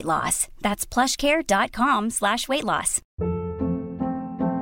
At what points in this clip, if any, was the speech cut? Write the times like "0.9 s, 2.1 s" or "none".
3.0 s